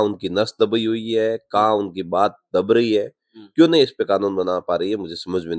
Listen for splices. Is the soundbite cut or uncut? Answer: uncut